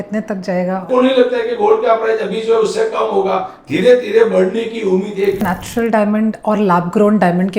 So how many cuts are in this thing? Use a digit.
2